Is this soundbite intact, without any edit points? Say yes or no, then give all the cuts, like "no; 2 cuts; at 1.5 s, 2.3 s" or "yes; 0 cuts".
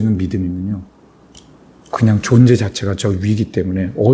yes; 0 cuts